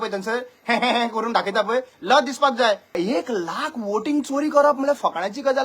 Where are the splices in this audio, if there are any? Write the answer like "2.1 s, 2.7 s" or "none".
3.0 s